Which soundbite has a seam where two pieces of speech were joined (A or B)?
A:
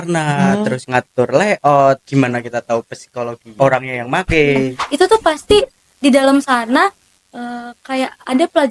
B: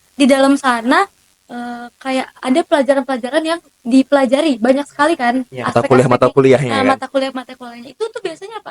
A